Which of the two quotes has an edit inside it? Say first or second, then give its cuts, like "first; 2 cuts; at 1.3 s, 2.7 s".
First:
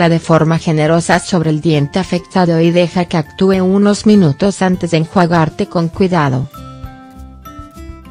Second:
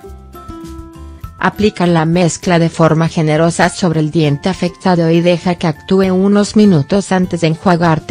second; 1 cut; at 1.3 s